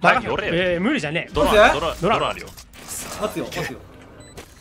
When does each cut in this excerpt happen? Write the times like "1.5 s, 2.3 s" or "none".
1.2 s